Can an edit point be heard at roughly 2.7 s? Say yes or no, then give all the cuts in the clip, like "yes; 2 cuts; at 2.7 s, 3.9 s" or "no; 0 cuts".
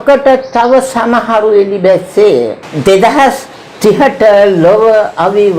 yes; 1 cut; at 2.7 s